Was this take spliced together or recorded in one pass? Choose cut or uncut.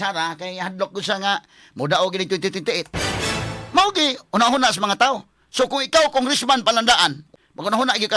cut